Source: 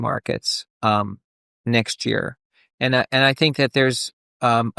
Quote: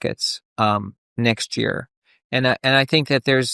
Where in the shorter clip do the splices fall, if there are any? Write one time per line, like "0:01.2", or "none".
0:01.0